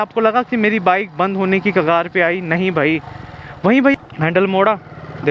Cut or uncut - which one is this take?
cut